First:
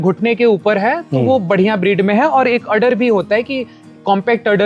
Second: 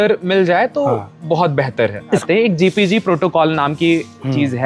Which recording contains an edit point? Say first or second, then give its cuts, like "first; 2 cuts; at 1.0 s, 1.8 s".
second; 1 cut; at 2.2 s